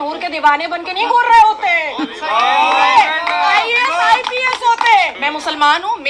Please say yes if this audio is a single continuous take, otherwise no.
no